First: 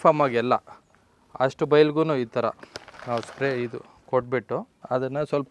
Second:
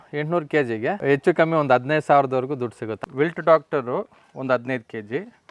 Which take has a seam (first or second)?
second